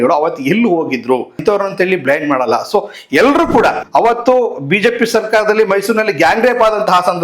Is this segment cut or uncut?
cut